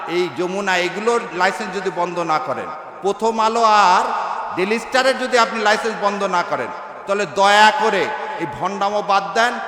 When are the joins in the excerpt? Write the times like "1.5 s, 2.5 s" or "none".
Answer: none